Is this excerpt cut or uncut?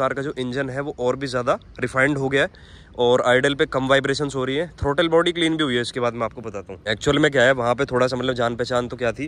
uncut